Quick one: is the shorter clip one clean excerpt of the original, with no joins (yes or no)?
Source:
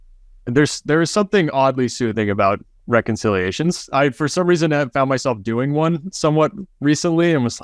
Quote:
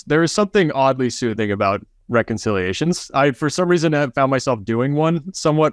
yes